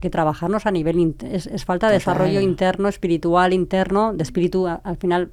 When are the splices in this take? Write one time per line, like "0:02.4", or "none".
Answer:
none

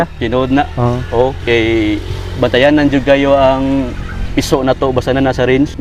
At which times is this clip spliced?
none

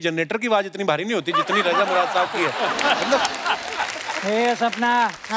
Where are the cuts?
0:04.1

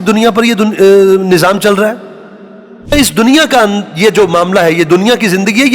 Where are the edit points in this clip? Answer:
0:02.9

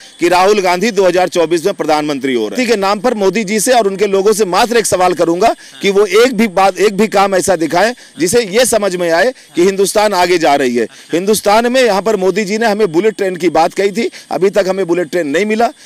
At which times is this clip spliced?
0:02.5

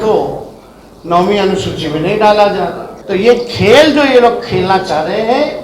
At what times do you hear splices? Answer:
0:02.9

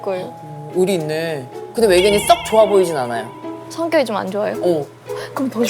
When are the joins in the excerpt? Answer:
0:01.5
0:04.9

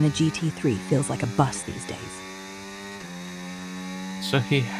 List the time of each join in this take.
none

